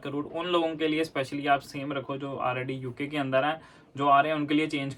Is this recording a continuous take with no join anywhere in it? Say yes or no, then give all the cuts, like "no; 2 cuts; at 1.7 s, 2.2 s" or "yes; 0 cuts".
yes; 0 cuts